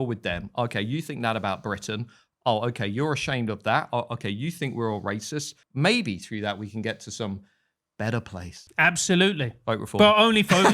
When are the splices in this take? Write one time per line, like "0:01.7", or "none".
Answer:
0:05.6
0:08.6